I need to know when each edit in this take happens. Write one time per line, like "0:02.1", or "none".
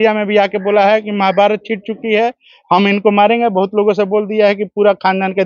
none